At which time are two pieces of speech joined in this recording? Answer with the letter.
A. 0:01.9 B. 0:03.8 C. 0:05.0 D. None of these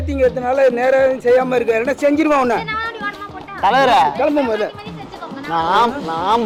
D